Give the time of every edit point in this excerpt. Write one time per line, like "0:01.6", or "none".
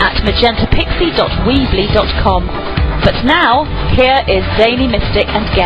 none